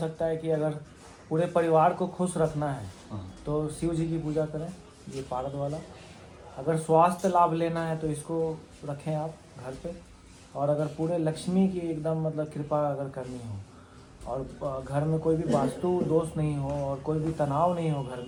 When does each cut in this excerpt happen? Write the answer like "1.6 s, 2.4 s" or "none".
none